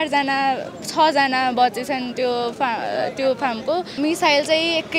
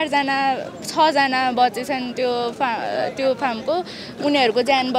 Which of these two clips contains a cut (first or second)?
first